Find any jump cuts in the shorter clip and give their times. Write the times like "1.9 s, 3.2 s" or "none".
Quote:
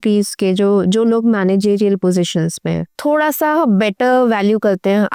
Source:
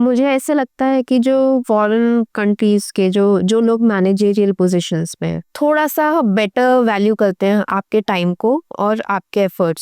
none

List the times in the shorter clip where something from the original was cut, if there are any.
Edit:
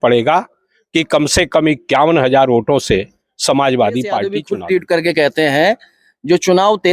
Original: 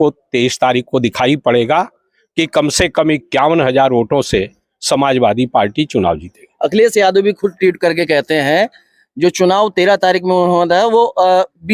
4.4 s

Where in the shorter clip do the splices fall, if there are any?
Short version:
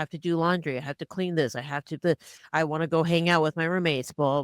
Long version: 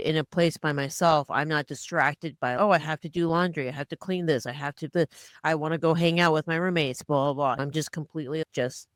none

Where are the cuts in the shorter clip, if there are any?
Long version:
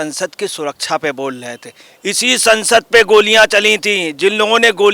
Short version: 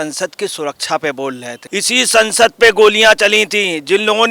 1.5 s

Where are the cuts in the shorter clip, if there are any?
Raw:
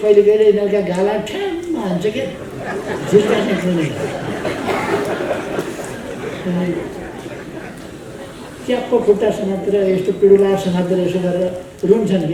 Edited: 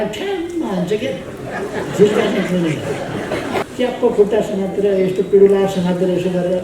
3.6 s

